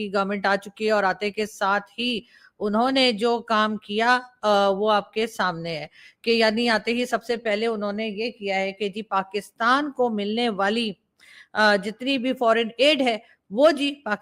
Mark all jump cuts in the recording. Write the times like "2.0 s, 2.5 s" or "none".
none